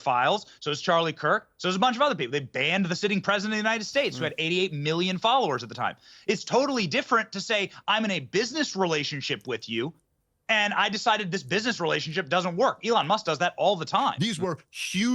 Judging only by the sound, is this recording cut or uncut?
cut